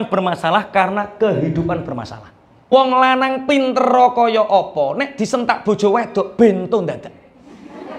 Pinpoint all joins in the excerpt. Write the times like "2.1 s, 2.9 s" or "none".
2.7 s